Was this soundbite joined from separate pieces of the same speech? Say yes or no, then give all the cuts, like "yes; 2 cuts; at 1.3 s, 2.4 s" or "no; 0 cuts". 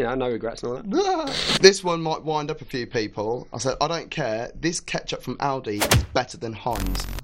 yes; 1 cut; at 1.6 s